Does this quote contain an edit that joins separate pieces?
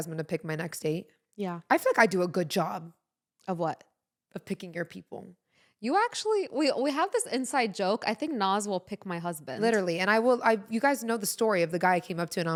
no; 0 cuts

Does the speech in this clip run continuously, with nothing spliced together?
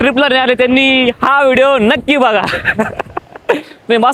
yes; 0 cuts

